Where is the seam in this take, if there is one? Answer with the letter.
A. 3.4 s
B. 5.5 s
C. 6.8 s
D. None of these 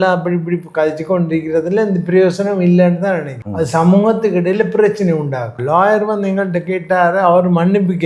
B